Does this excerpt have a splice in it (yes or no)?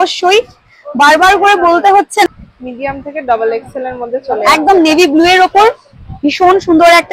yes